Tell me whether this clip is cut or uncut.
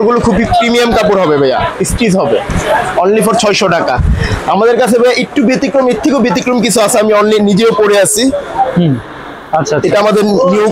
uncut